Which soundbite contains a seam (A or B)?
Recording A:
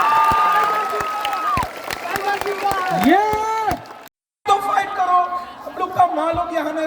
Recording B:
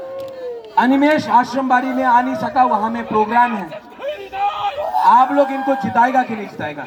A